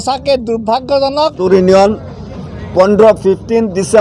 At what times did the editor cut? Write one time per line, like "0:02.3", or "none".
0:01.4